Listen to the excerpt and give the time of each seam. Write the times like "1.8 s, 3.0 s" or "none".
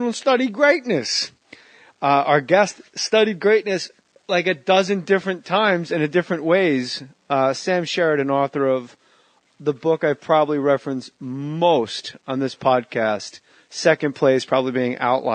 none